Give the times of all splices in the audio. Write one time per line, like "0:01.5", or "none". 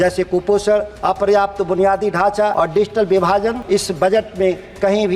0:00.9
0:02.5
0:03.6